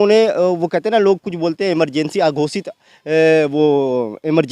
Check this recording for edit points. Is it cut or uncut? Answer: uncut